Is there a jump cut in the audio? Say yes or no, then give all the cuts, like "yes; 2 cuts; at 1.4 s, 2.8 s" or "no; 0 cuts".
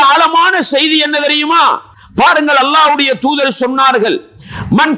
no; 0 cuts